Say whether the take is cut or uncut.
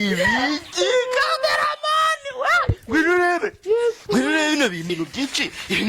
cut